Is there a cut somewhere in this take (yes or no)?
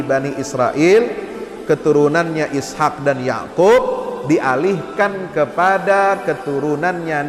no